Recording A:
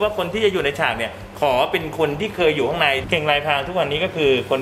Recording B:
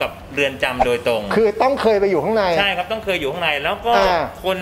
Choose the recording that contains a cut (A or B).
A